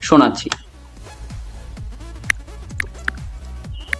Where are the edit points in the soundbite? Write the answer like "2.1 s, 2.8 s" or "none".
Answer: 1.0 s